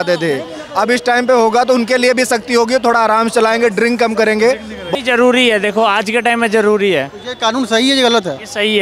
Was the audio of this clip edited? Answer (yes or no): yes